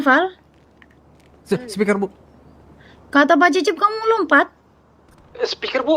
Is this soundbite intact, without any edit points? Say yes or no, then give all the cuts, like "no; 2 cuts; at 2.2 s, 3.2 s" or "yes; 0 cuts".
yes; 0 cuts